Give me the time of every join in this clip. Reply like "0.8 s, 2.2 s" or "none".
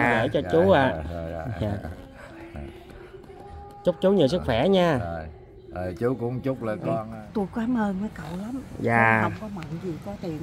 7.0 s